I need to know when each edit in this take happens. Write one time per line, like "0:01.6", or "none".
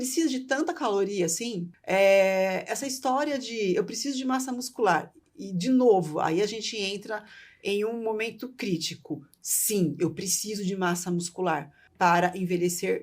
0:01.8
0:11.8